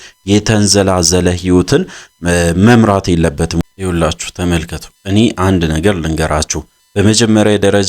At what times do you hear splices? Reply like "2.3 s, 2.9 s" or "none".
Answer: 3.6 s